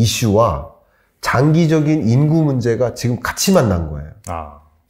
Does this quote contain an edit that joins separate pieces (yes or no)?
no